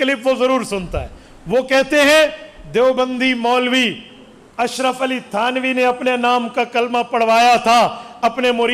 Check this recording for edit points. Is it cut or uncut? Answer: uncut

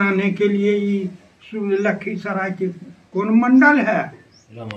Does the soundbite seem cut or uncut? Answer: uncut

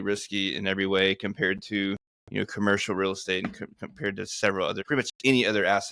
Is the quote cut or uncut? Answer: cut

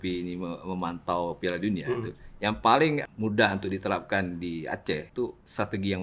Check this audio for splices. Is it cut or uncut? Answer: cut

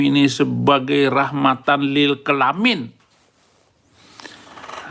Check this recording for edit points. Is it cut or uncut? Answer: uncut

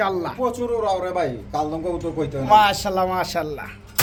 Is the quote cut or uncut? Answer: uncut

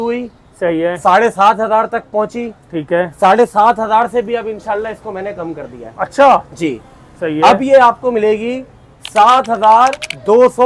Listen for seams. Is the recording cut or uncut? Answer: uncut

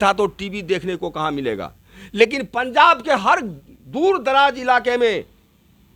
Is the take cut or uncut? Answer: uncut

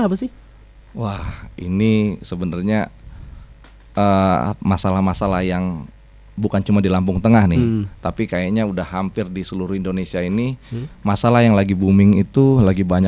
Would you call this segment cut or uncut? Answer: uncut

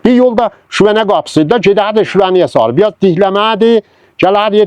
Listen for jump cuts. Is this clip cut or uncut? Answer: uncut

